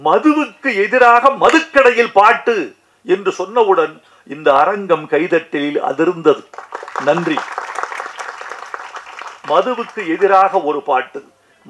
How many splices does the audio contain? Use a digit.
0